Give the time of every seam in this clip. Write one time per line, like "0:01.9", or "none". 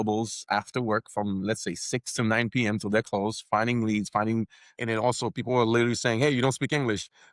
0:04.8